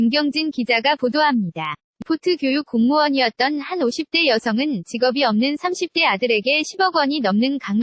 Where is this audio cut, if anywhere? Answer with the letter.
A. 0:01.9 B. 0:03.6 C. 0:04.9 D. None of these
A